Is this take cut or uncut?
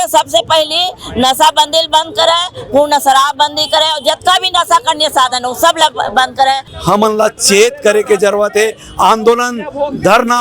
cut